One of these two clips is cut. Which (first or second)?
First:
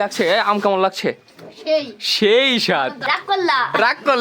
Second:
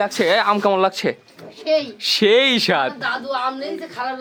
first